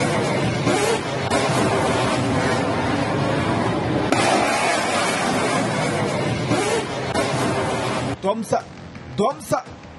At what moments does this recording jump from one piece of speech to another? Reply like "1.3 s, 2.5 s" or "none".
2.2 s